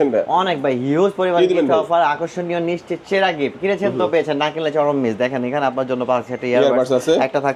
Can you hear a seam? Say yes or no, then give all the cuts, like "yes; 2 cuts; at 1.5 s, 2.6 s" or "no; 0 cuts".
no; 0 cuts